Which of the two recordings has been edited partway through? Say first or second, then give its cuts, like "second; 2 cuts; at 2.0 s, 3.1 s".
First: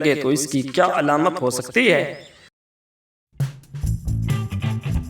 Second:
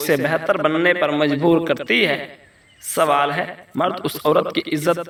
first; 1 cut; at 3.3 s